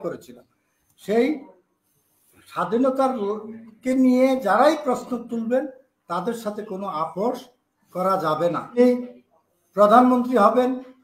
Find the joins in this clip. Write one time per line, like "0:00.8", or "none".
0:08.8